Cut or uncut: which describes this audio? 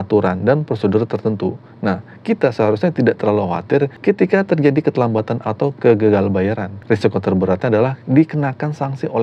cut